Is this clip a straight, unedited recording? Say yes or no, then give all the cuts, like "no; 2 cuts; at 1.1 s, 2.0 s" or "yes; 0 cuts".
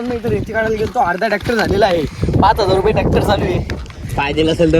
yes; 0 cuts